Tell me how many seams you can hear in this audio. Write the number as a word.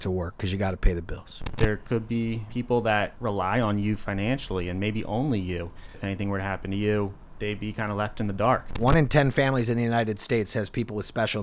six